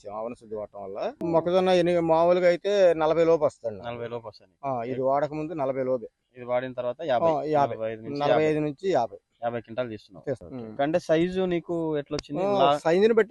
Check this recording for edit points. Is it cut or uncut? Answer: cut